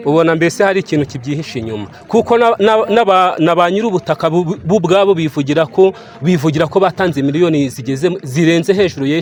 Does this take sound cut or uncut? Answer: uncut